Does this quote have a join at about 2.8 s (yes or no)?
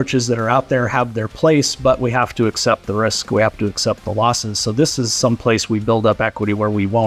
no